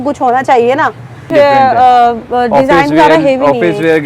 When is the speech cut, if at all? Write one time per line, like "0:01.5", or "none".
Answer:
0:01.3